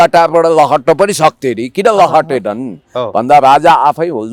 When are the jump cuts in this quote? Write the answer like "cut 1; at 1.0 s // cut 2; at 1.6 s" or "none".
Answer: none